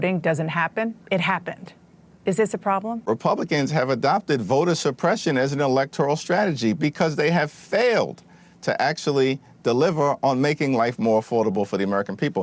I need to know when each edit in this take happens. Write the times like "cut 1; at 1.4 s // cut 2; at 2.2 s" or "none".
cut 1; at 3.0 s